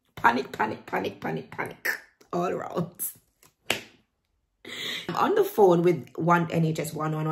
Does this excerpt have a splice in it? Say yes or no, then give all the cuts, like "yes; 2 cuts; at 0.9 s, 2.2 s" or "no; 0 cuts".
yes; 1 cut; at 5.1 s